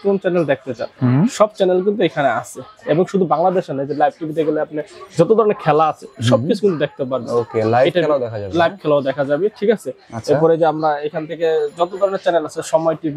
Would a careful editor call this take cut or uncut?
uncut